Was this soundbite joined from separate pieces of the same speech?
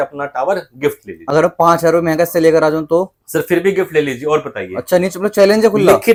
no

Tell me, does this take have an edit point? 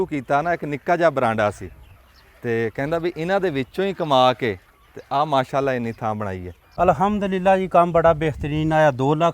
yes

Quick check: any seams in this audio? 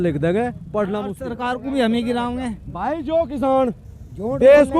yes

